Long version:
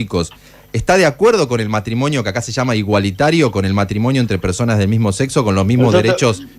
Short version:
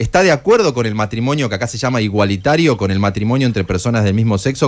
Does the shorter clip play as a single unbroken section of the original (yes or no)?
yes